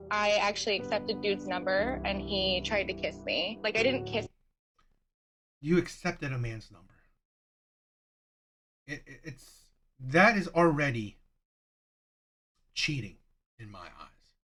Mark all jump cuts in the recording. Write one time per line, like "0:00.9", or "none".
none